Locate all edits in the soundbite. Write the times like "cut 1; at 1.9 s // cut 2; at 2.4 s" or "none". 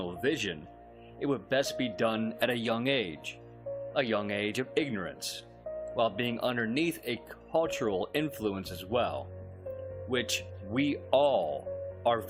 cut 1; at 1.6 s